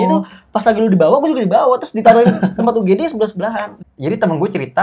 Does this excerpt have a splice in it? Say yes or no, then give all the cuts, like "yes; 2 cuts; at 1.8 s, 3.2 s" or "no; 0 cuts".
yes; 1 cut; at 3.7 s